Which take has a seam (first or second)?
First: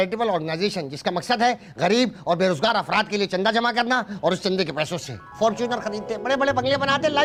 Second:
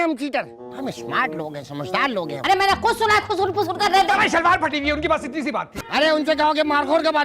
second